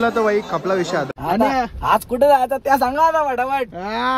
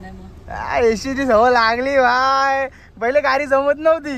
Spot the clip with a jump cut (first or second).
first